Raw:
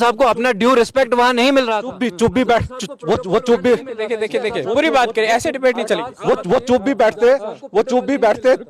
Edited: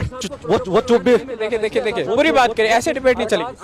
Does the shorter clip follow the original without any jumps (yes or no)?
yes